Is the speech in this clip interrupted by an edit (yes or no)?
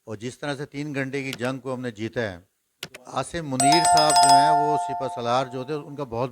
yes